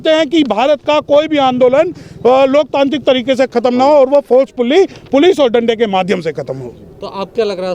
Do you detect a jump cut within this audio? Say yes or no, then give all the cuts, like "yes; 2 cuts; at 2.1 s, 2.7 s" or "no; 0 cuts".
no; 0 cuts